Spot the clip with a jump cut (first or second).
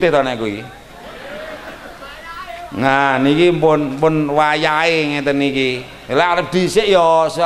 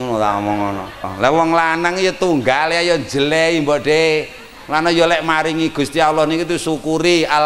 second